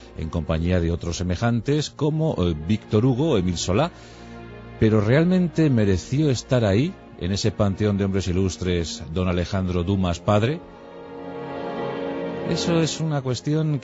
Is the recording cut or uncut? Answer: uncut